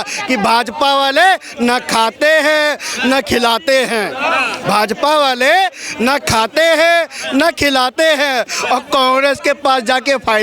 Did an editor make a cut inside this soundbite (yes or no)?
no